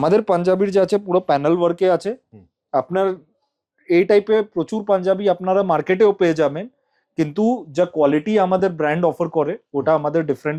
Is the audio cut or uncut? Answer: uncut